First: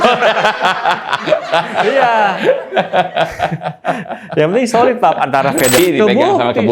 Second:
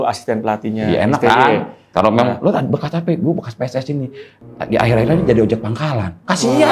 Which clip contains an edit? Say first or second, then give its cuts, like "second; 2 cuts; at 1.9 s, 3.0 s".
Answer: first; 1 cut; at 5.8 s